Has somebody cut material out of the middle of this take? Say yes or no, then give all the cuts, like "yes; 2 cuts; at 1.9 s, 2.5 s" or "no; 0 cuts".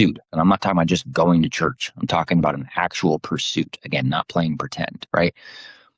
no; 0 cuts